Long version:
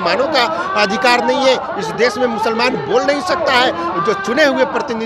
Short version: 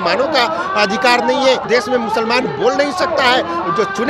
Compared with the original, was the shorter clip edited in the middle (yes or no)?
yes